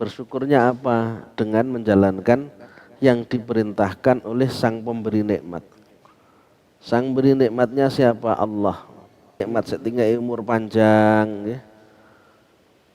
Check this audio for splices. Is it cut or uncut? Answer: cut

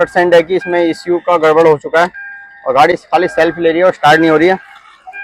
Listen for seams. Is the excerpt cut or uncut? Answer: uncut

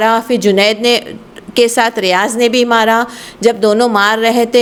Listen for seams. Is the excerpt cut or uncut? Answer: uncut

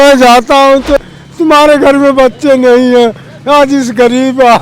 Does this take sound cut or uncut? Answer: cut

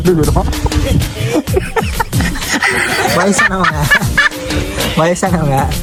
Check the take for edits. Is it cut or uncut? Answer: uncut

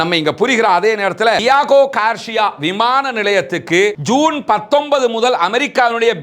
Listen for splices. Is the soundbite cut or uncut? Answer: cut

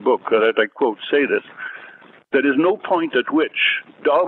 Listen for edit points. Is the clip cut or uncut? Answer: uncut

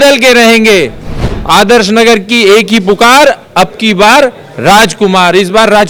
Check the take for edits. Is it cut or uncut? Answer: uncut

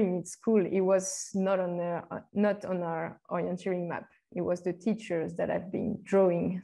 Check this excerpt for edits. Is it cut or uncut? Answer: uncut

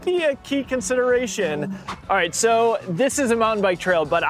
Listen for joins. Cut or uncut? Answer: cut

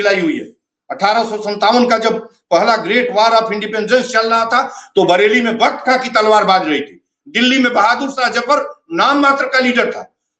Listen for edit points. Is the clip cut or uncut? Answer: uncut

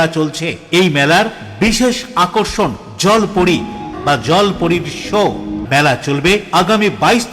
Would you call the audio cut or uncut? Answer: cut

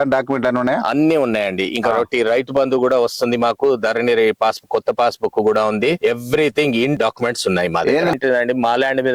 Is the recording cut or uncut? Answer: cut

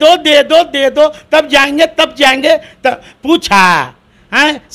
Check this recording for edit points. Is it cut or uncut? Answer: uncut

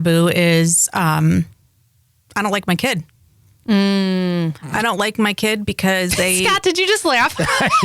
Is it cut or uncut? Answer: uncut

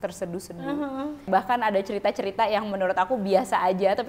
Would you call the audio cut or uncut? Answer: cut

